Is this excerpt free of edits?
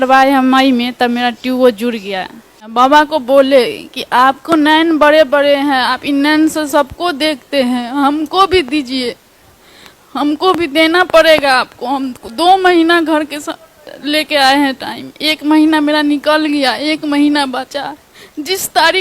no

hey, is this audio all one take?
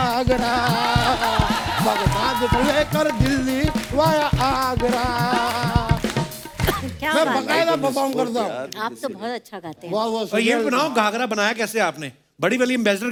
yes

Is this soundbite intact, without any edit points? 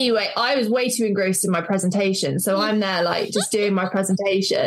yes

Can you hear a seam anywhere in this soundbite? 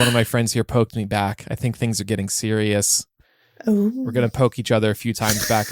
no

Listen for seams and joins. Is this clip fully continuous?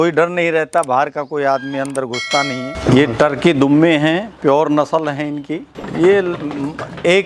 no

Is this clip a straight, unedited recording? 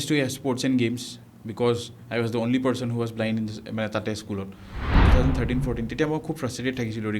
no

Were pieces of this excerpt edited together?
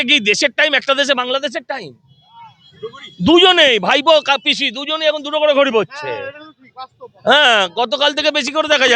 no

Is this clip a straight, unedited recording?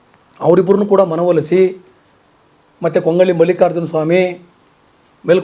yes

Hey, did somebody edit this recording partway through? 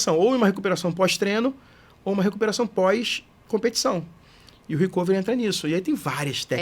no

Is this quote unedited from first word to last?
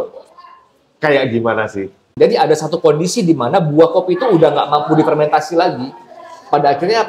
no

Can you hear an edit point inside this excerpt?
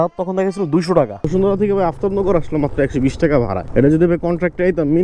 yes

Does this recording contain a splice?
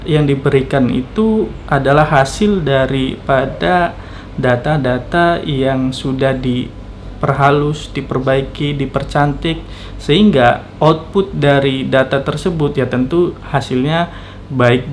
no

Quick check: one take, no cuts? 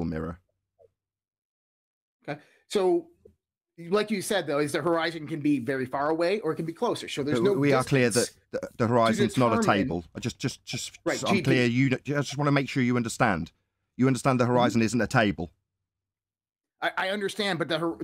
yes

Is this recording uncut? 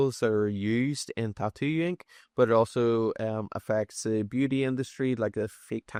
yes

